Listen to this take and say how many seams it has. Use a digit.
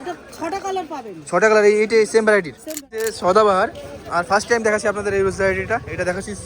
1